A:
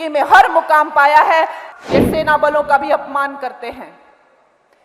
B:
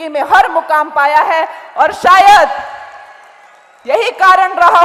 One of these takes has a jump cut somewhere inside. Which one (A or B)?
A